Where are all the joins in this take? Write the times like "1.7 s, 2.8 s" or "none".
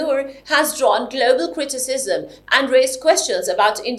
none